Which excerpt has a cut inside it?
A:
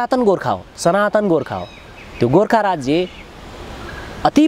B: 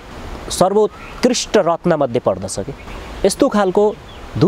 B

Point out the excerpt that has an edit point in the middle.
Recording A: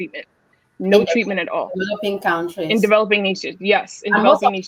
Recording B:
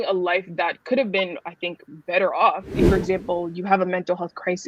B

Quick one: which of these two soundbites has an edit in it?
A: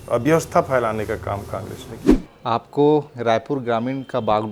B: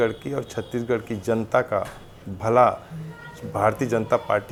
A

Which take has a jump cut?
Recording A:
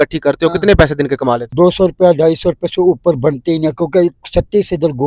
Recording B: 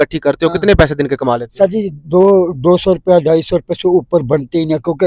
A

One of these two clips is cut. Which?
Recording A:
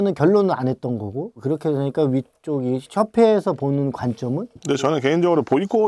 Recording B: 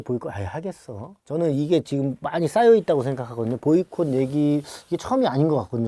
A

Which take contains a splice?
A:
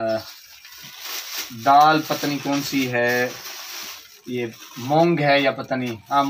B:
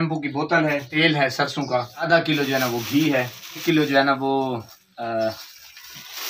B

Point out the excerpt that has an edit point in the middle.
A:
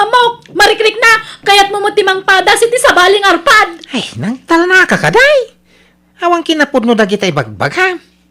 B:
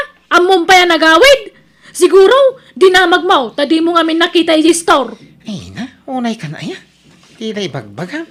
A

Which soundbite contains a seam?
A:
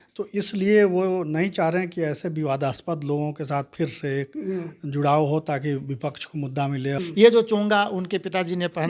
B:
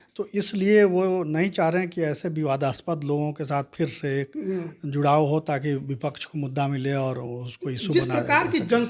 A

